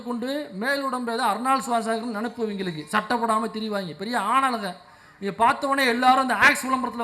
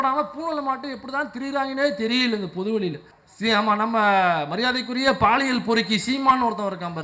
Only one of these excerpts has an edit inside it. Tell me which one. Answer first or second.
second